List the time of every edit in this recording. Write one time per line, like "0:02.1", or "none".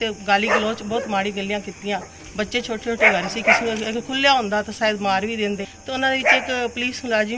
0:05.7